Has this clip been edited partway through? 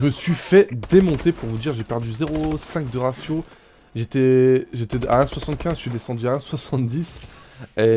yes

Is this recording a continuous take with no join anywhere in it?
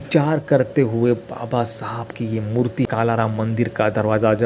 no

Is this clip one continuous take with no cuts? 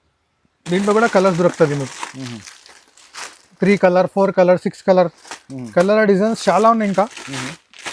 yes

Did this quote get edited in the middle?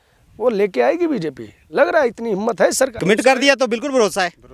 yes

